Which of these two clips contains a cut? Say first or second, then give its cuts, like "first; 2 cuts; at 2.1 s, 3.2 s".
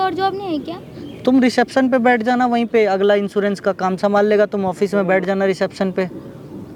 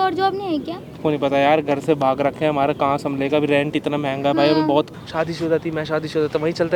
second; 2 cuts; at 0.9 s, 4.9 s